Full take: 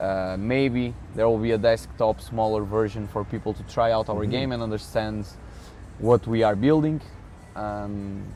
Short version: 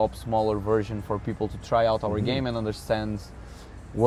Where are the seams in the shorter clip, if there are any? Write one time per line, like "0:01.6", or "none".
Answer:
none

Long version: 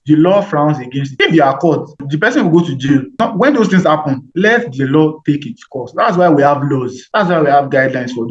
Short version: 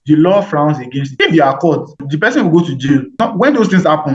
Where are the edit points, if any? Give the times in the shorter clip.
none

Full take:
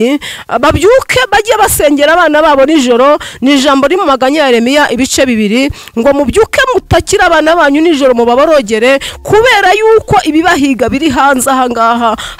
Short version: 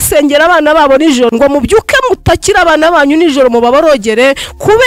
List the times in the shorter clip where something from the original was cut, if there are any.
0:01.3

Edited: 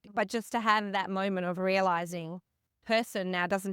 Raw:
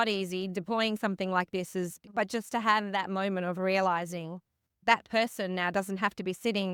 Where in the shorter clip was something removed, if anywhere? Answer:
0:02.8

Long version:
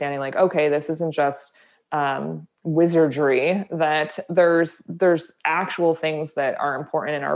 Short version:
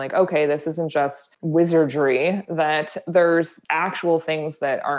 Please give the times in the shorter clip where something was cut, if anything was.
0:01.3
0:03.6

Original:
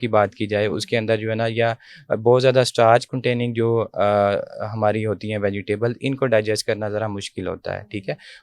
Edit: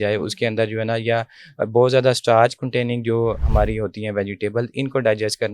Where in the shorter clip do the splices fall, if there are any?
0:03.4

